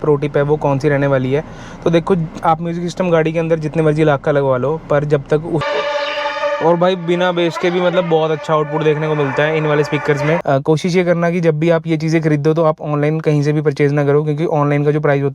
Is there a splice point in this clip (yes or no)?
yes